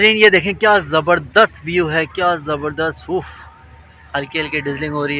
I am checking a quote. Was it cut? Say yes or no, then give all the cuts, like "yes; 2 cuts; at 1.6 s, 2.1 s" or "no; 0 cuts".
no; 0 cuts